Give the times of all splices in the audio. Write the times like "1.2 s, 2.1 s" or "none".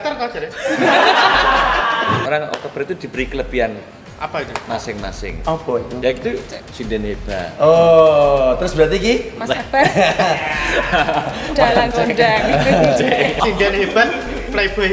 2.2 s, 13.4 s